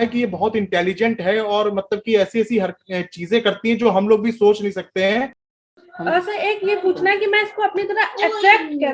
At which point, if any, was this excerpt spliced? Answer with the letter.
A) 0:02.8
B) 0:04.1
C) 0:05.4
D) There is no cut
C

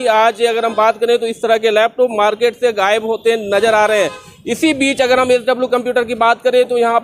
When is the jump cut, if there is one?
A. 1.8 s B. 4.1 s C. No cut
C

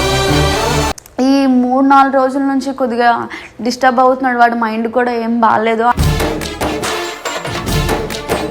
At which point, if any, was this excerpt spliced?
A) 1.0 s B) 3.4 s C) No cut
A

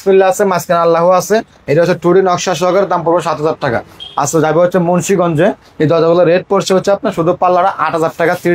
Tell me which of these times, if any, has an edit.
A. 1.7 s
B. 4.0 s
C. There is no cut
B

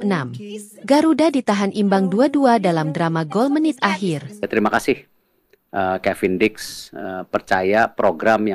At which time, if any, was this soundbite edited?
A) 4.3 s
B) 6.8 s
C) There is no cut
A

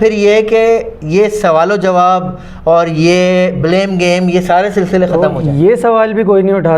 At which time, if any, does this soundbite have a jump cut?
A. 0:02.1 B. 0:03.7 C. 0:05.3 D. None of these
C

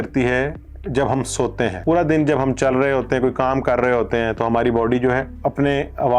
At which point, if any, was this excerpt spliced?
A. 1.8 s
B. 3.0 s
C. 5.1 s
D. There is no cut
A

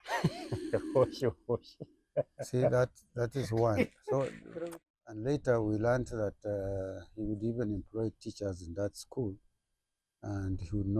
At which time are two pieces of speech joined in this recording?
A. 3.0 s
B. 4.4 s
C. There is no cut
B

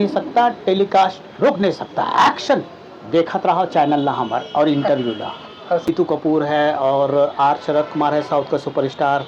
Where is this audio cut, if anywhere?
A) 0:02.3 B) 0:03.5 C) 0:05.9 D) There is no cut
C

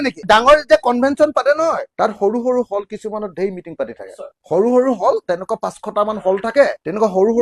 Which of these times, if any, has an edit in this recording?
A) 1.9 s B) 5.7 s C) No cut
C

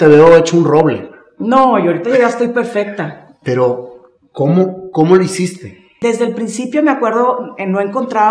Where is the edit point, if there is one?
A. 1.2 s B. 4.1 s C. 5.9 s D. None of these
C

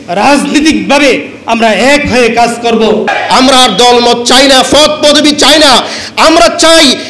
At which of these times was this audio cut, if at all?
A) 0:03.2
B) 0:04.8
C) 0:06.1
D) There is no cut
A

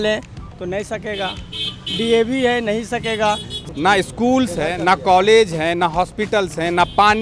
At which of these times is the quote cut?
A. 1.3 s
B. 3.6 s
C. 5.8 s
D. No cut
B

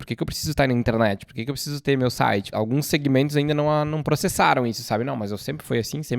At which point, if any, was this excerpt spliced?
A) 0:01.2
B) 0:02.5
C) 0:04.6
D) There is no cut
B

